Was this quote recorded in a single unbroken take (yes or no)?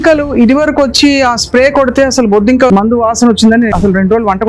no